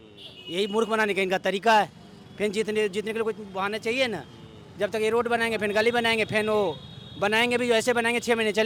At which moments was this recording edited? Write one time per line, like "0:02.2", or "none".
none